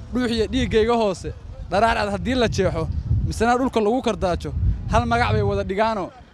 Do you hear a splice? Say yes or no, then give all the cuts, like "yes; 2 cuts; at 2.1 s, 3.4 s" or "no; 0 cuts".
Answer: no; 0 cuts